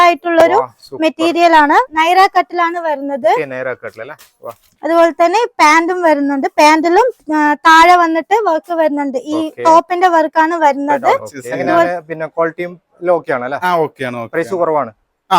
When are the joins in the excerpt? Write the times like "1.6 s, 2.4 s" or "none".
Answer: 1.9 s, 11.9 s